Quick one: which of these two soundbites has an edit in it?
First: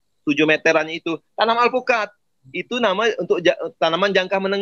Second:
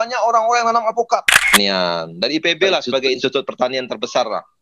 second; 2 cuts; at 1.5 s, 3.2 s

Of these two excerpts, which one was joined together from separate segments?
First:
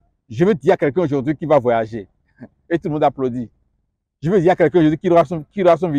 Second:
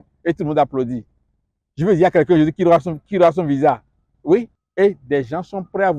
second; 1 cut; at 4.6 s

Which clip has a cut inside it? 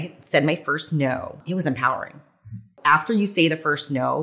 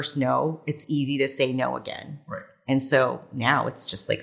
first; 2 cuts; at 1.4 s, 2.7 s

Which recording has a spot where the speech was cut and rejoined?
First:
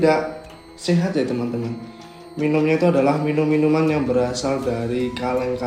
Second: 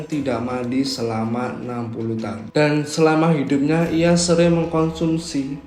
second; 1 cut; at 2.4 s

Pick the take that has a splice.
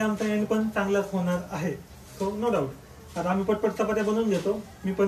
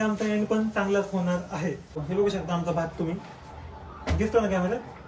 second; 1 cut; at 2.0 s

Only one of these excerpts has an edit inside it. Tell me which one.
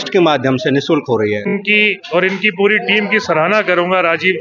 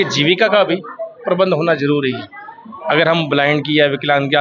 first; 1 cut; at 1.5 s

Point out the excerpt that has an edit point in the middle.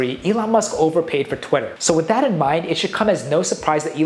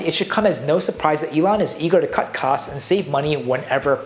first; 1 cut; at 1.7 s

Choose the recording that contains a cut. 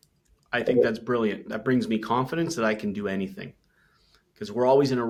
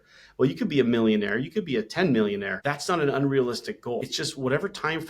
second; 2 cuts; at 2.5 s, 4.1 s

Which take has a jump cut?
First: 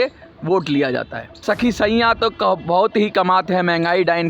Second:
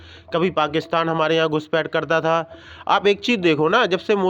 first; 1 cut; at 1.4 s

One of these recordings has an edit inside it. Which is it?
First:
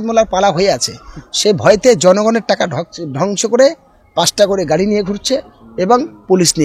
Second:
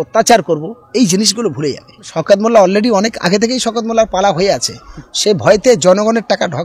second; 1 cut; at 2.1 s

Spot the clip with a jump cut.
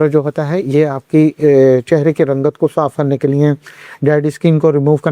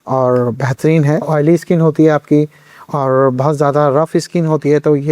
second; 1 cut; at 1.3 s

